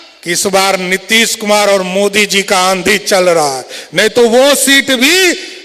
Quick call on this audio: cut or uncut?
uncut